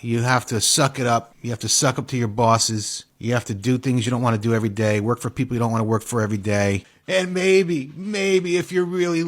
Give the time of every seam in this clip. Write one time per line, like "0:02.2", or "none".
0:06.9